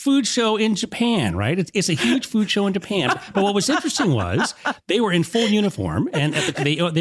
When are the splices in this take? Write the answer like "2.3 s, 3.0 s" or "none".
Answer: none